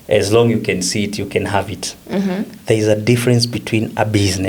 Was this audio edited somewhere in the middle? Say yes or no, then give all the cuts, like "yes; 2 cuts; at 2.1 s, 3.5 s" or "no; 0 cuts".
yes; 1 cut; at 2.0 s